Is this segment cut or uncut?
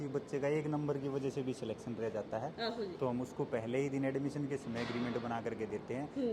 uncut